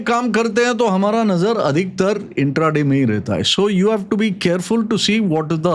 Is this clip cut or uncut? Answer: uncut